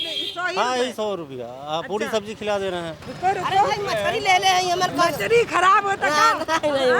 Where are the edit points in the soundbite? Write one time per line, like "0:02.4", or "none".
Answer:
0:03.0